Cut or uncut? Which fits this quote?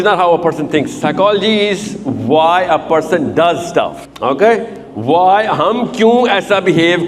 cut